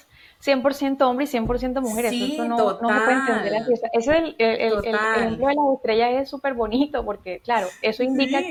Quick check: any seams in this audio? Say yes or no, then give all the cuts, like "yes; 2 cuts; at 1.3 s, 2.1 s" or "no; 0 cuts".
no; 0 cuts